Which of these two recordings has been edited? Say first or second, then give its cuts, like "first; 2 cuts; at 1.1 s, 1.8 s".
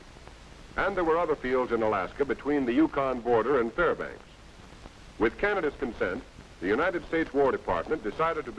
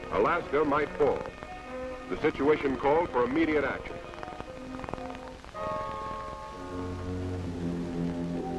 second; 1 cut; at 4.7 s